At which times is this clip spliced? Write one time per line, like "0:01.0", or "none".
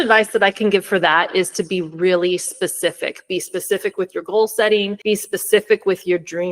0:04.9